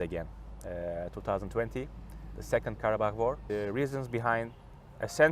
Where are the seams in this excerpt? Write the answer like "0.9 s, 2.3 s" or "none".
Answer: 3.4 s